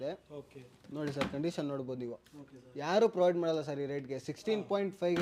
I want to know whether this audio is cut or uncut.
uncut